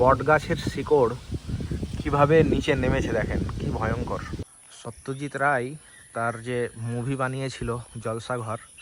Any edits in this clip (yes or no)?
yes